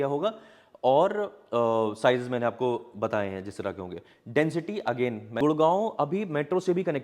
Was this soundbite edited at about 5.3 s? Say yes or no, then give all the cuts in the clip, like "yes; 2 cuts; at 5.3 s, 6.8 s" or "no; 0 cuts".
yes; 1 cut; at 5.3 s